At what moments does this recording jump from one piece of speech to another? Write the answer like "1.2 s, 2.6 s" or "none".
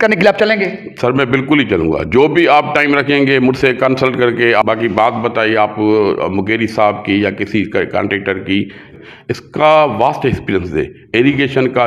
4.7 s, 9.0 s